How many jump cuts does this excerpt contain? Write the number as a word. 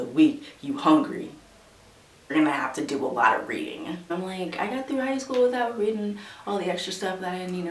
two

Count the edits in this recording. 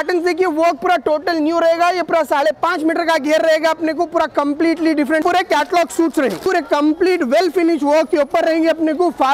two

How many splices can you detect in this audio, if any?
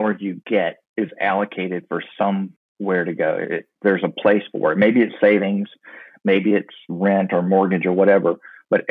two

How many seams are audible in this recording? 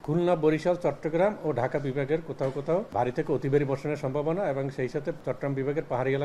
two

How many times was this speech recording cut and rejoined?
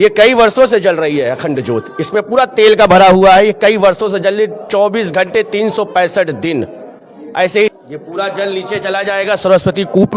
one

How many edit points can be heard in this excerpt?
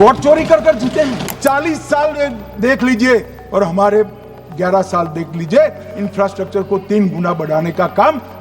one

